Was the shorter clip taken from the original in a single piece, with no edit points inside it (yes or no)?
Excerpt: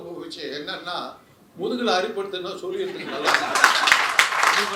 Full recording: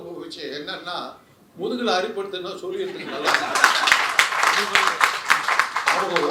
yes